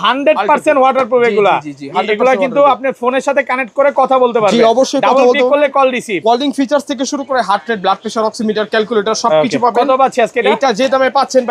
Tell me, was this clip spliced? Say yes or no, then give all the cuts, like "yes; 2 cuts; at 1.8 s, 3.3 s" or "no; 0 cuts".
no; 0 cuts